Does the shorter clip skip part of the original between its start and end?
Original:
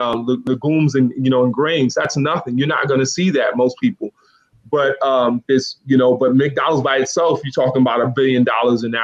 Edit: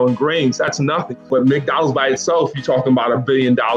yes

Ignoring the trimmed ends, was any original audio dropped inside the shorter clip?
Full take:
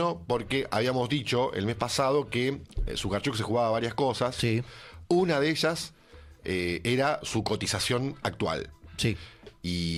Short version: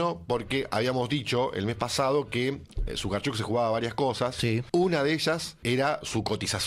yes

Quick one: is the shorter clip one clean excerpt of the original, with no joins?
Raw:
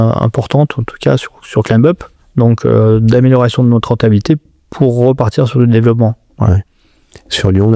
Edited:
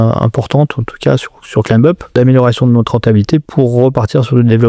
no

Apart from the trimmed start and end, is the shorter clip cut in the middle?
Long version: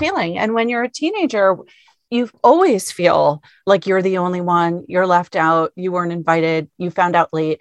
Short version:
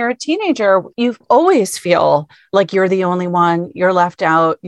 yes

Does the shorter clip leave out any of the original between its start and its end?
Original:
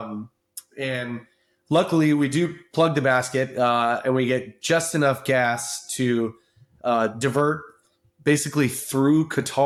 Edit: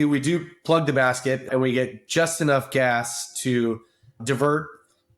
yes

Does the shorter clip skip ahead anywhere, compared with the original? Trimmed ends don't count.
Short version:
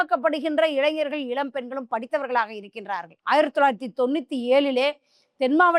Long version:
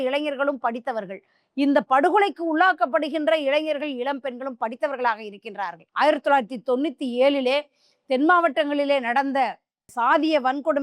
no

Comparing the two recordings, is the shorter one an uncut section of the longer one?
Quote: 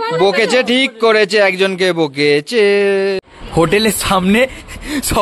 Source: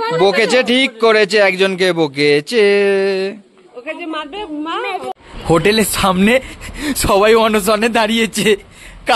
no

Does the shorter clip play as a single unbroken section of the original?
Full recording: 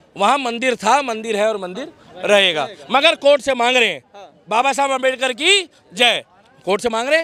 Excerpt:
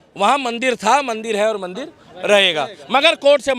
yes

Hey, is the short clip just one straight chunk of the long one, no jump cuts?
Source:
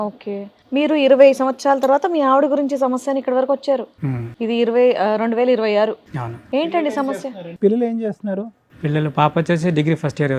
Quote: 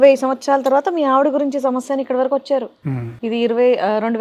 yes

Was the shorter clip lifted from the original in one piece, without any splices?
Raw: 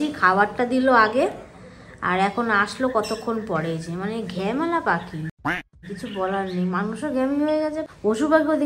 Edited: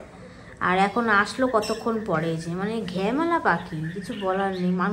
no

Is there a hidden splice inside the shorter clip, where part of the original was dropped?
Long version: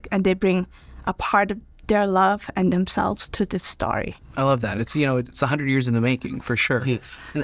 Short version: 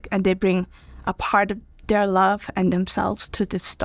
no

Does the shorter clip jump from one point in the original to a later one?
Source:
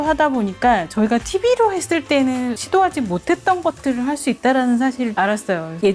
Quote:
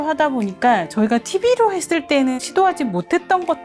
yes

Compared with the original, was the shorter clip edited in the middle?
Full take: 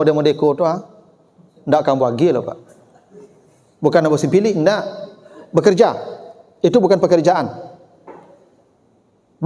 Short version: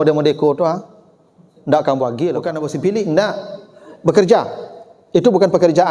yes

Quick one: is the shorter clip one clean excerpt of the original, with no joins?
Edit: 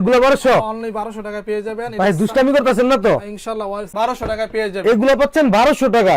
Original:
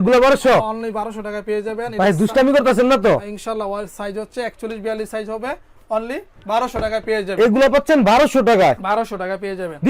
no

